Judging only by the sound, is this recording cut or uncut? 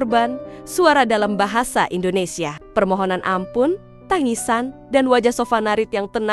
uncut